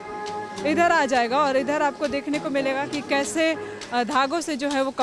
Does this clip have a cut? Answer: no; 0 cuts

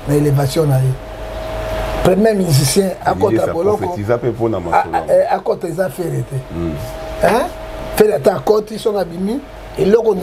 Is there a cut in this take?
no; 0 cuts

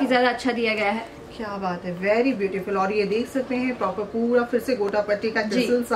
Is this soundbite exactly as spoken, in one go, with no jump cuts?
yes; 0 cuts

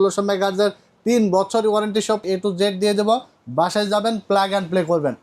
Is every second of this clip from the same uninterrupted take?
no; 1 cut; at 2.2 s

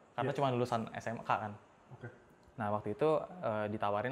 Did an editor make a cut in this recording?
no; 0 cuts

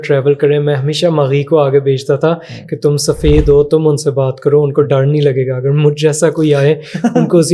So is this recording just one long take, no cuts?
yes; 0 cuts

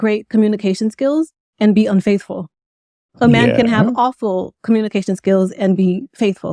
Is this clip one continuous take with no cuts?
yes; 0 cuts

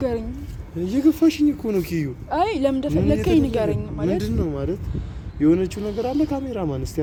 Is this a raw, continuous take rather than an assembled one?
yes; 0 cuts

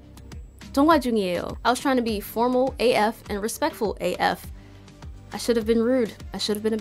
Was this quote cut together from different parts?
yes; 1 cut; at 1.5 s

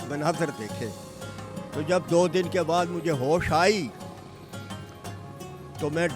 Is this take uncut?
yes; 0 cuts

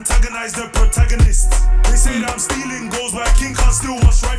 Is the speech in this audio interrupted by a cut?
no; 0 cuts

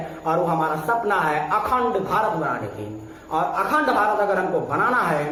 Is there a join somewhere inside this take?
no; 0 cuts

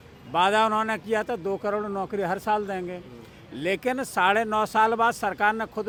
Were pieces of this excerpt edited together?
no; 0 cuts

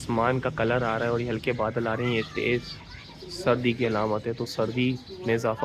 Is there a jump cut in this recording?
no; 0 cuts

